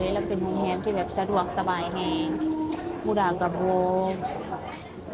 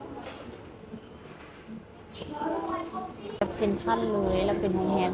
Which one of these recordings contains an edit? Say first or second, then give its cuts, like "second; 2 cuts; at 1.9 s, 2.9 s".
second; 1 cut; at 3.4 s